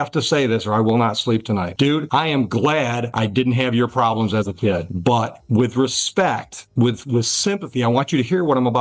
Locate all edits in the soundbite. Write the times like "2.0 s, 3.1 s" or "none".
none